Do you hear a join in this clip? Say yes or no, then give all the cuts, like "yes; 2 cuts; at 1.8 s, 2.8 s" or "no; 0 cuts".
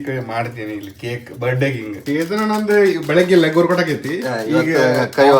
yes; 1 cut; at 2.0 s